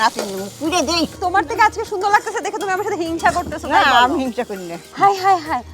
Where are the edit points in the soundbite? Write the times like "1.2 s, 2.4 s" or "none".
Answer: 1.2 s, 4.8 s